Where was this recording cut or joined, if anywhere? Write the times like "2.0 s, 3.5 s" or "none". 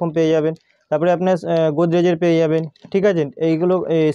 none